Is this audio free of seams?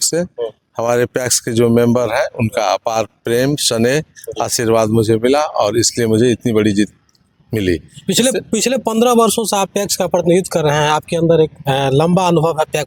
yes; 0 cuts

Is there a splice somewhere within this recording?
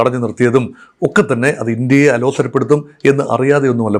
no; 0 cuts

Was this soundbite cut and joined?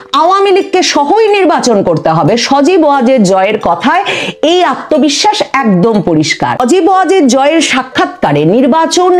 yes; 1 cut; at 6.6 s

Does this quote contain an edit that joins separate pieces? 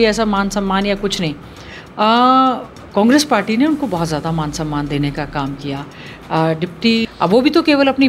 yes; 1 cut; at 7.0 s

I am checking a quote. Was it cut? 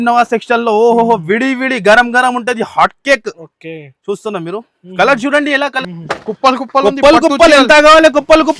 yes; 1 cut; at 5.9 s

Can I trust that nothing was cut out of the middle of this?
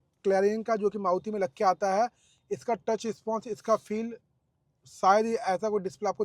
yes; 0 cuts

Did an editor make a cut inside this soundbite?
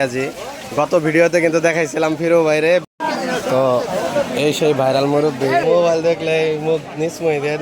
yes; 2 cuts; at 2.6 s, 5.6 s

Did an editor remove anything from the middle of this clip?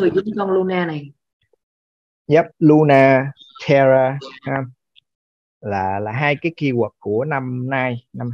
no; 0 cuts

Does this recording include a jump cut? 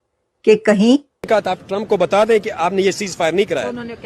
yes; 1 cut; at 1.6 s

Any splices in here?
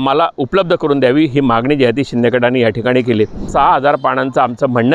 yes; 1 cut; at 3.5 s

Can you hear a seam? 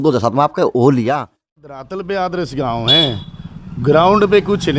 yes; 1 cut; at 1.6 s

